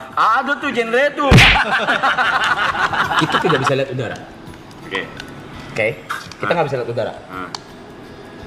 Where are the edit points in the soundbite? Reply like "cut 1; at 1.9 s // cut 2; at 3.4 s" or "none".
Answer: cut 1; at 3.2 s